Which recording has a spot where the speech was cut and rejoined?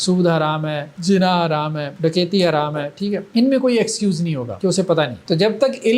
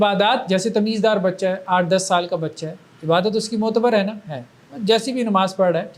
first; 5 cuts; at 0.9 s, 1.9 s, 3.2 s, 4.5 s, 5.2 s

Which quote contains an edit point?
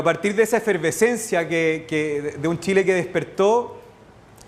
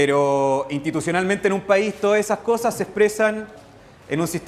first; 1 cut; at 2.3 s

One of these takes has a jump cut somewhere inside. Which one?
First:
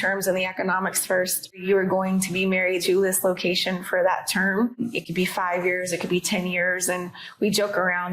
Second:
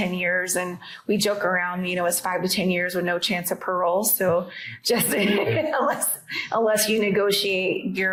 first; 3 cuts; at 1.6 s, 2.8 s, 4.8 s

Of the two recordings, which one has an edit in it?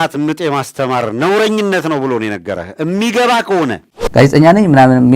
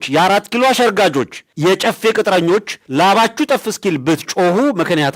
first; 1 cut; at 4.0 s

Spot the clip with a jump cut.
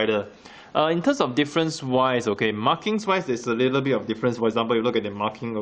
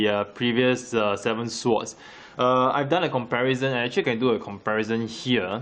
first; 1 cut; at 1.8 s

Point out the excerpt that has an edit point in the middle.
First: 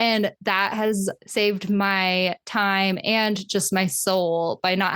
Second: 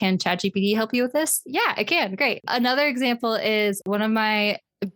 second; 2 cuts; at 2.4 s, 3.8 s

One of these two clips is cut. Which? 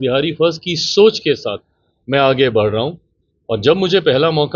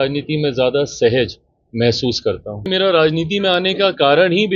second; 1 cut; at 2.7 s

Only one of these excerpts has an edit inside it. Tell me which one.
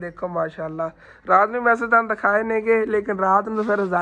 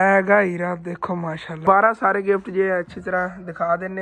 second; 1 cut; at 1.6 s

